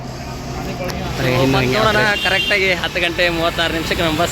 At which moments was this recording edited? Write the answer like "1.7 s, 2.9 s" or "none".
1.8 s